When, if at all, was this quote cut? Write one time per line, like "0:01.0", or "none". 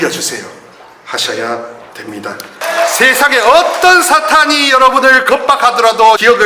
0:02.5

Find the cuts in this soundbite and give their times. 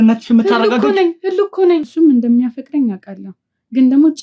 0:01.9

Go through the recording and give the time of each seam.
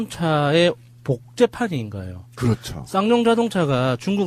0:02.3

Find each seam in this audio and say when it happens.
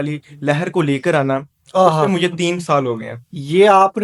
none

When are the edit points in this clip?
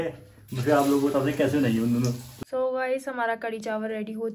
0:02.3

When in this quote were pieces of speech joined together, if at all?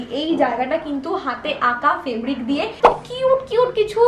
0:02.8

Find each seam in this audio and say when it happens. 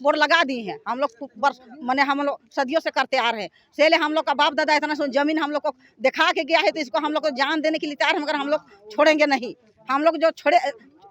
none

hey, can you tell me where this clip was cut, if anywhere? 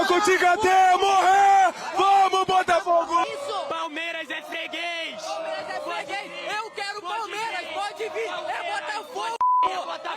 0:03.2

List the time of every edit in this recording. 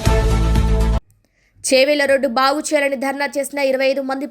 0:01.1

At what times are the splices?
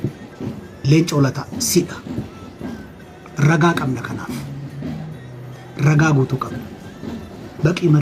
none

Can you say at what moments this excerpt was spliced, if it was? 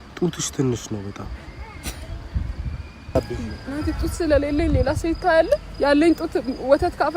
0:03.2

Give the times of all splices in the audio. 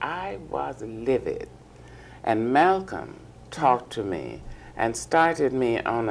0:03.8

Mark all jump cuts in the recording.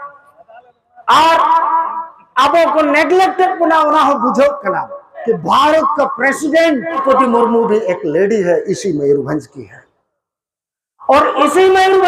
0:05.2
0:07.0

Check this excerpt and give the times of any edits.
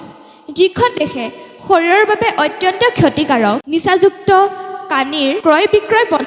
0:03.6
0:05.4

